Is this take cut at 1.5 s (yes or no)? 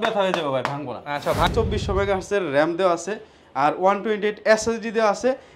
yes